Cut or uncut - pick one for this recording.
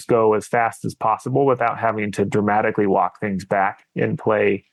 uncut